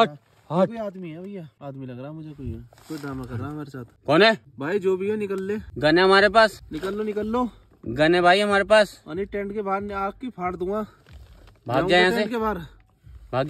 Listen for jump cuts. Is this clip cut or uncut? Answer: cut